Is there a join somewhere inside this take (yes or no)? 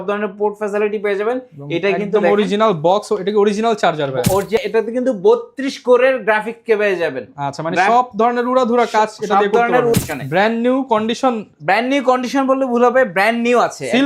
yes